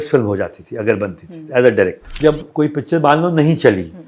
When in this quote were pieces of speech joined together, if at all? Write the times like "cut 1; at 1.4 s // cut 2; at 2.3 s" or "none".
cut 1; at 2.1 s